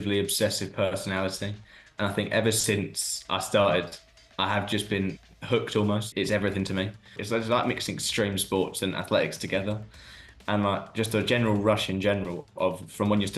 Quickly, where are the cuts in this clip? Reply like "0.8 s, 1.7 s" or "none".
6.1 s, 7.1 s